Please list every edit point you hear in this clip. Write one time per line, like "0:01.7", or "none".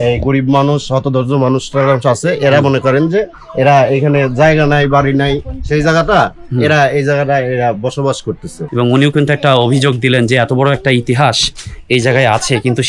0:08.5